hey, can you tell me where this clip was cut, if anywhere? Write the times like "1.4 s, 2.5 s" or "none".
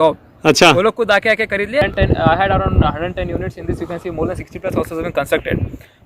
1.8 s